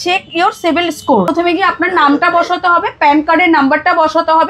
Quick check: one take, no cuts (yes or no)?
no